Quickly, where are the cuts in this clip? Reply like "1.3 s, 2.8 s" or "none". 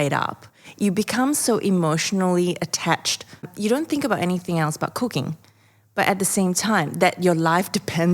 3.5 s